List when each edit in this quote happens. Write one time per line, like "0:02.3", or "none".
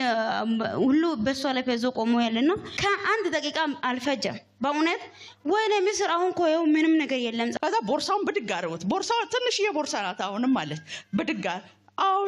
0:02.7
0:07.5